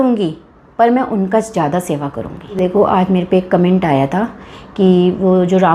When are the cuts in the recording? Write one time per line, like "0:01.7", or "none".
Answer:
0:02.6